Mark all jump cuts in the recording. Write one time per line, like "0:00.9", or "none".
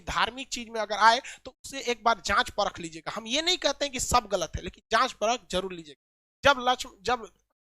none